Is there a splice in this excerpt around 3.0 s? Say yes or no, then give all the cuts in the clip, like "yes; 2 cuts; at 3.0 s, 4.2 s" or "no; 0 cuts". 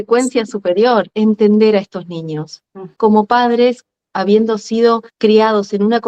yes; 2 cuts; at 1.1 s, 3.0 s